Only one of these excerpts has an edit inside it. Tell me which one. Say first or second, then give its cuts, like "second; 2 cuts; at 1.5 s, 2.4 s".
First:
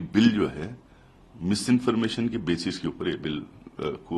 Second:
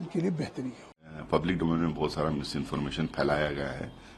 second; 1 cut; at 1.0 s